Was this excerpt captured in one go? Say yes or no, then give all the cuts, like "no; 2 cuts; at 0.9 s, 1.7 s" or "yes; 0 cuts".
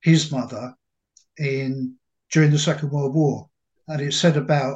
no; 1 cut; at 3.7 s